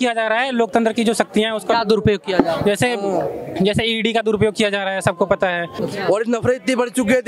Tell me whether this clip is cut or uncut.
cut